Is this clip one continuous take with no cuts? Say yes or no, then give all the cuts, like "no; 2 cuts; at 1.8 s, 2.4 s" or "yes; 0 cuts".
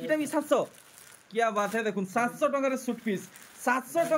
yes; 0 cuts